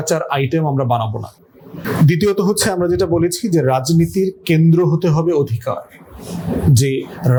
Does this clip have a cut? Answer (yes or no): no